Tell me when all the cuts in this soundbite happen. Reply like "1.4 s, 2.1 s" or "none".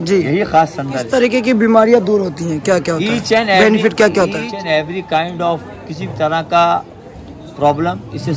1.0 s, 4.5 s